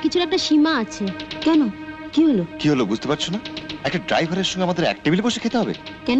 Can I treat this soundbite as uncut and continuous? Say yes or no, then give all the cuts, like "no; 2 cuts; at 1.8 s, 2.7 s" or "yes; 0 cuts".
yes; 0 cuts